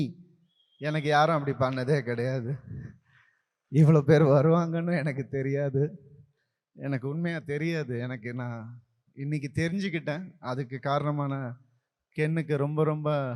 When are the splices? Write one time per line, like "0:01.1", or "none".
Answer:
none